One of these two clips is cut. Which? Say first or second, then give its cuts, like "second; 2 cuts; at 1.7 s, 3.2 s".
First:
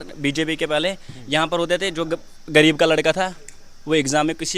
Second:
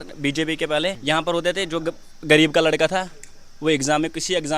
second; 1 cut; at 1.0 s